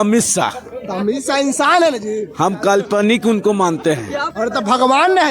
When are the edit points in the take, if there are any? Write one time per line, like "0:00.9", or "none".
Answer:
0:04.2